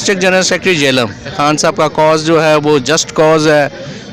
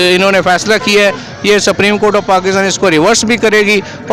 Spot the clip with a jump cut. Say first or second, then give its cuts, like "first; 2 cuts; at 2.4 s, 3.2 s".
first; 1 cut; at 1.3 s